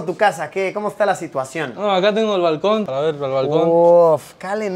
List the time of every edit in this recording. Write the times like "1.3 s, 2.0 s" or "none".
none